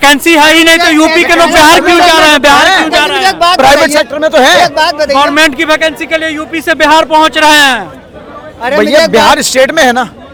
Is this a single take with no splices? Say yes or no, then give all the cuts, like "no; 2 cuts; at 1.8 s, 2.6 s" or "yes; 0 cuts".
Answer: yes; 0 cuts